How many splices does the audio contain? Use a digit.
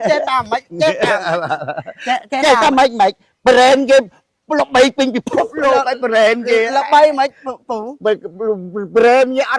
0